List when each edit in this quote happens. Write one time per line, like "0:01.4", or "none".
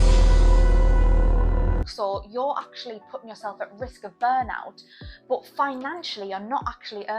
none